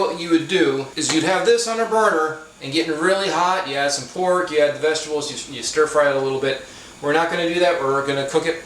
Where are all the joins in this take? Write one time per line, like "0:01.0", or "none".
0:00.9

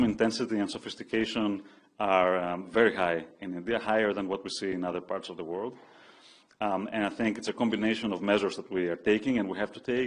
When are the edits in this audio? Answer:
none

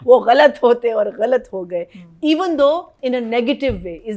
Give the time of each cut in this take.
none

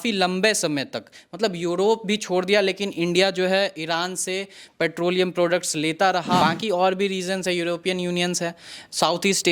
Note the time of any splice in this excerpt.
0:06.4

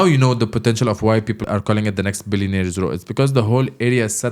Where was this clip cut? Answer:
0:01.4

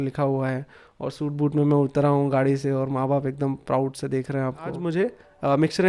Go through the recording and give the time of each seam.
0:04.8

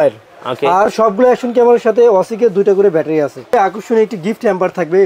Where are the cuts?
0:03.5

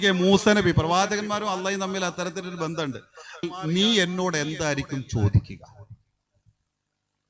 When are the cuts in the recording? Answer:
0:03.4

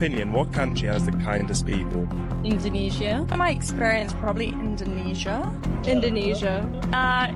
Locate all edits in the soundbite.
none

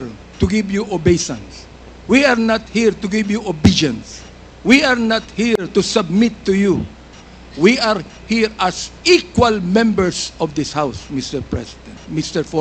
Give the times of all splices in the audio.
none

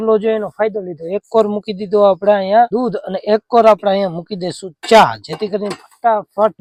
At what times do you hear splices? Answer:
none

